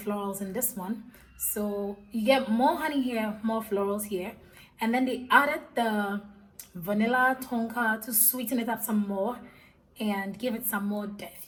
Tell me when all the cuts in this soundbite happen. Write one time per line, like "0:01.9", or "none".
none